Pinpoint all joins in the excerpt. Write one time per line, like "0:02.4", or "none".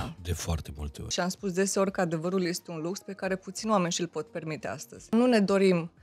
0:01.1
0:05.1